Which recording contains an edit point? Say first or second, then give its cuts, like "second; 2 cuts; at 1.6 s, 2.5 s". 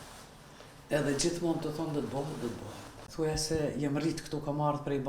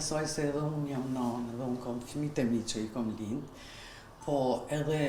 first; 1 cut; at 3.0 s